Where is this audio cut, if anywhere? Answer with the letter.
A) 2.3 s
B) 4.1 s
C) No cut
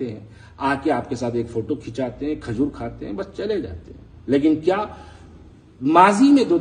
C